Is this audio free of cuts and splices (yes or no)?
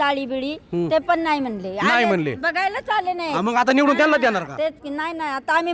yes